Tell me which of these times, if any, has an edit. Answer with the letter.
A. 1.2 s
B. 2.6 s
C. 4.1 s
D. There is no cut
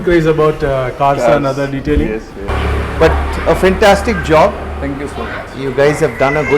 B